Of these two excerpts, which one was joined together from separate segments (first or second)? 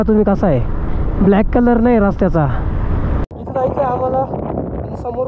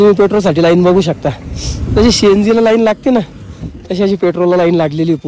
first